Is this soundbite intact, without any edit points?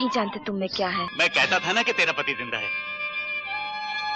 no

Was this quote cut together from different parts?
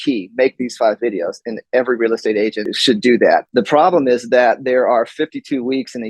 yes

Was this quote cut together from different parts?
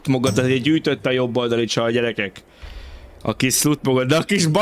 no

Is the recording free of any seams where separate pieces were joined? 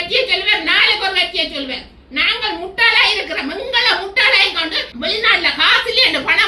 no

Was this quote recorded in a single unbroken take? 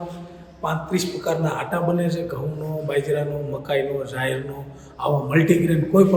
yes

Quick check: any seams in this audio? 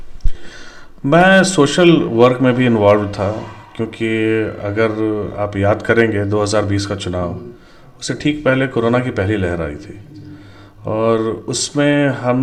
no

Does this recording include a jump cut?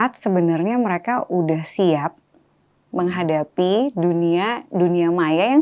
no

